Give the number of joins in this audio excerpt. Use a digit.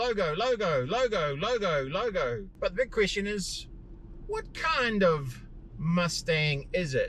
1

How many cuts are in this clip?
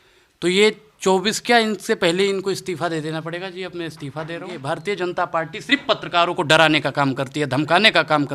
1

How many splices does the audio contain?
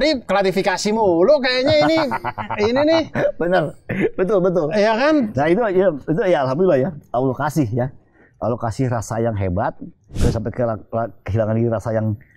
1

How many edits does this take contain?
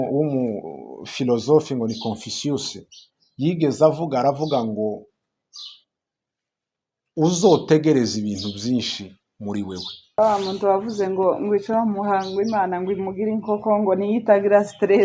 1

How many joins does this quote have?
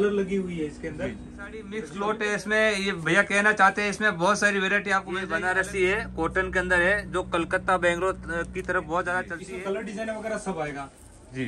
3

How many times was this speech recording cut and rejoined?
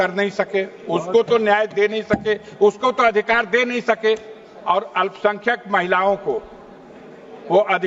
0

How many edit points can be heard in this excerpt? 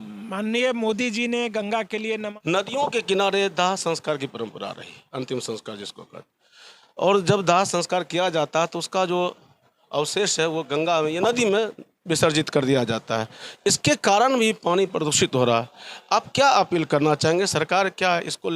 1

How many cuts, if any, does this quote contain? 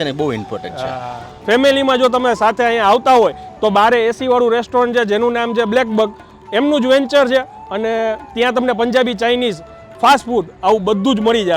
1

